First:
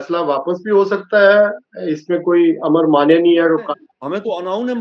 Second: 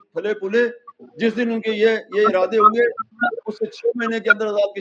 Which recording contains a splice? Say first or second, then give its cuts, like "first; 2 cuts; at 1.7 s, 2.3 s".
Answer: first; 1 cut; at 3.6 s